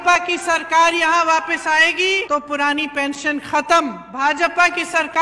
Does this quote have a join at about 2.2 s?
yes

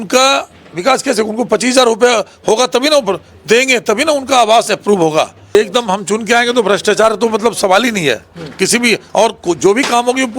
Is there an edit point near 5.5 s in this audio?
yes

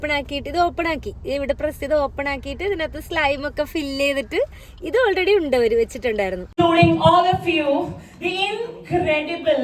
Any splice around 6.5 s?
yes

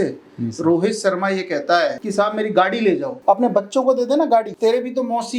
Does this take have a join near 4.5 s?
yes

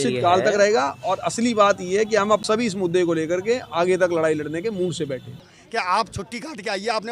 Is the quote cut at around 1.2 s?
no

